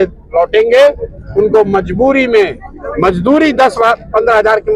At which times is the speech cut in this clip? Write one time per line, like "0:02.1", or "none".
none